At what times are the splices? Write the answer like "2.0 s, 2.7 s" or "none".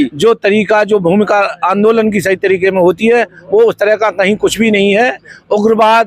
none